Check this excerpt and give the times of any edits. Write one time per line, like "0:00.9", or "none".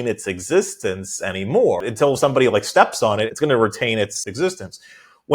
0:01.8
0:03.3
0:04.3